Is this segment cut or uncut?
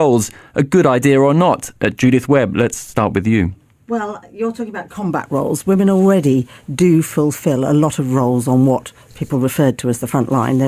cut